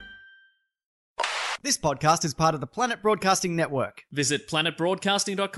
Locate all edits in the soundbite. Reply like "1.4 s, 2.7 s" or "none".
1.2 s